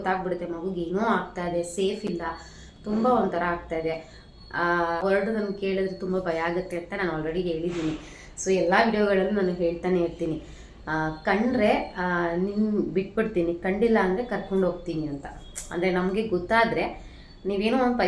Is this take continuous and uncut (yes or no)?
yes